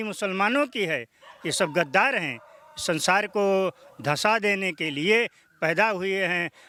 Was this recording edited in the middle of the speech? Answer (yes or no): no